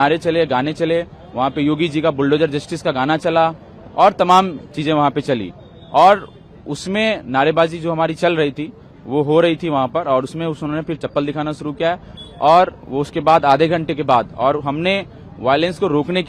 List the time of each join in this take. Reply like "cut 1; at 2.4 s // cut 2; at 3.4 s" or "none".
none